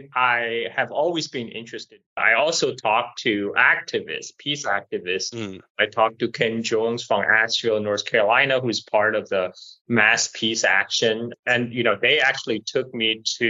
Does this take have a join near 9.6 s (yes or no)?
no